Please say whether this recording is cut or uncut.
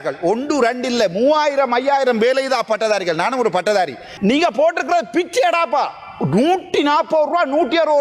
cut